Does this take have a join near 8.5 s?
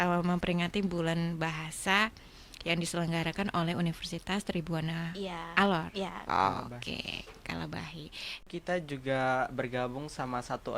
yes; 1 cut; at 8.5 s

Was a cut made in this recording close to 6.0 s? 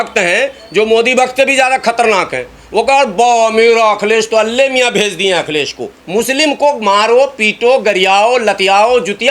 yes; 1 cut; at 6.0 s

